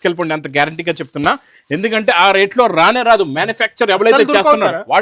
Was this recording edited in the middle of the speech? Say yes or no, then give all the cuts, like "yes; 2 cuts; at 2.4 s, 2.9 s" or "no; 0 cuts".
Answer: no; 0 cuts